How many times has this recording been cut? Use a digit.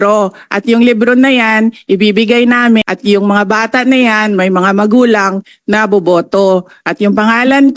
1